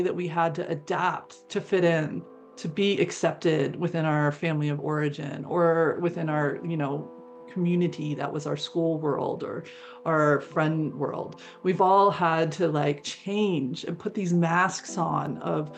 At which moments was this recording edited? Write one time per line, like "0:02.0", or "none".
none

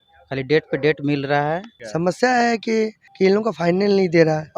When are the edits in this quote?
0:01.8
0:03.0

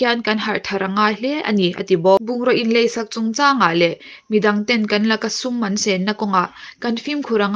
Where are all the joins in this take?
0:02.3

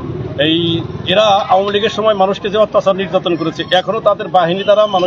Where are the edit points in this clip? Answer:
none

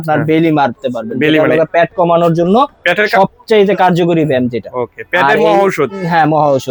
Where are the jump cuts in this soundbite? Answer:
none

